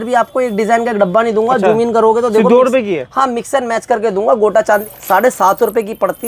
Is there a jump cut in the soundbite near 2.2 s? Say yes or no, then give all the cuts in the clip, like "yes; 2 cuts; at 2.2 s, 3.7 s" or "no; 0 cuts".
no; 1 cut; at 4.8 s